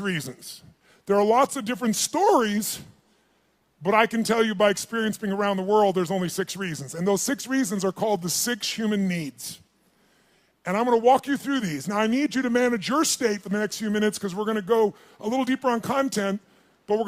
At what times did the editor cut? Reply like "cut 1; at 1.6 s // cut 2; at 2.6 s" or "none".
cut 1; at 13.2 s